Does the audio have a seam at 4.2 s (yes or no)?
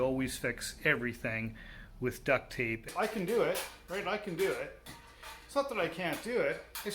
no